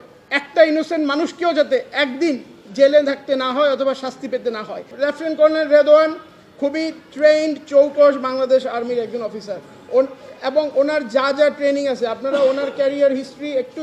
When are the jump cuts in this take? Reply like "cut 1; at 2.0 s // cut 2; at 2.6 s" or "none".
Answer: cut 1; at 4.8 s